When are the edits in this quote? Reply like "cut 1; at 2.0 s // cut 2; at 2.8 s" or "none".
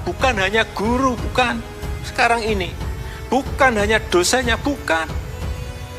cut 1; at 5.1 s